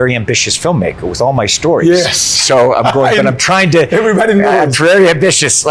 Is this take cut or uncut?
uncut